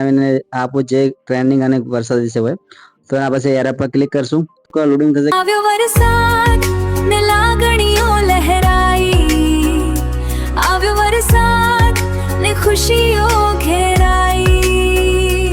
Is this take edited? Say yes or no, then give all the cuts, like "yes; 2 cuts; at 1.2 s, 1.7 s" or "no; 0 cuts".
yes; 1 cut; at 5.3 s